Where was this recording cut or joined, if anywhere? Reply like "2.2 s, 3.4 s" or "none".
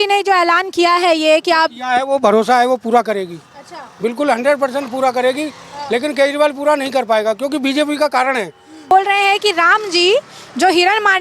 8.9 s